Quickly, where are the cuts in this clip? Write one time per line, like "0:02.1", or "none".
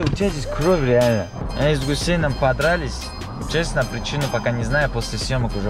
0:01.4